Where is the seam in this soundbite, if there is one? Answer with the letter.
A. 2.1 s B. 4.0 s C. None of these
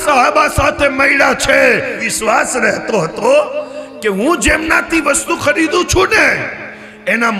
A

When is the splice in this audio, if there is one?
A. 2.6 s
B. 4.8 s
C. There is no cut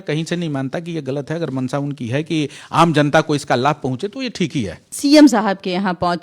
B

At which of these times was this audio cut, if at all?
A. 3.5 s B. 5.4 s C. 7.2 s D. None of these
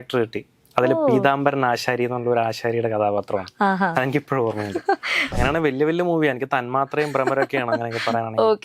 B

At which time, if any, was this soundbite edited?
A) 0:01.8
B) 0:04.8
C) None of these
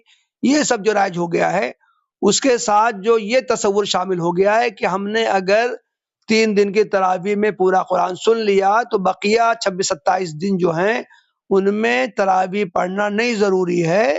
C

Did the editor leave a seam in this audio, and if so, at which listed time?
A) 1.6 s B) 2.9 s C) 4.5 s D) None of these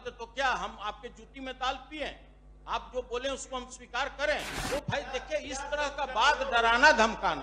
C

